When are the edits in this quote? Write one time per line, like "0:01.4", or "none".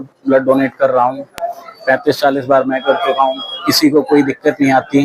none